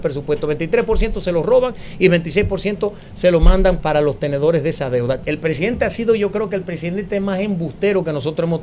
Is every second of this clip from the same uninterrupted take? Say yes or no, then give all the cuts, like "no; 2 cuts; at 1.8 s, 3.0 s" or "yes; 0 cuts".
no; 2 cuts; at 3.8 s, 5.2 s